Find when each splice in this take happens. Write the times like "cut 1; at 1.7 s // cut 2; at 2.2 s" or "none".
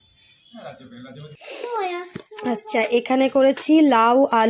cut 1; at 1.4 s